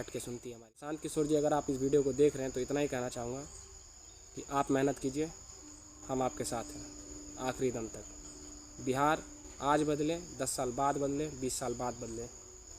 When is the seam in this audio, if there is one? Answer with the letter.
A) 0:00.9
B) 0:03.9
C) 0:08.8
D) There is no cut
A